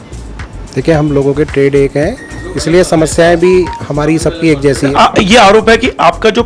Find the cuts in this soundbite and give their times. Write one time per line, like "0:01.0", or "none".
0:04.9